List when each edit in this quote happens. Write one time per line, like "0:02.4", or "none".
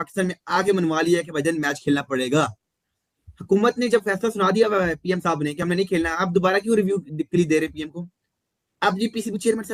none